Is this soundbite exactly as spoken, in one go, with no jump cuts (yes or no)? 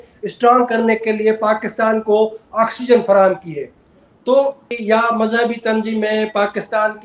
no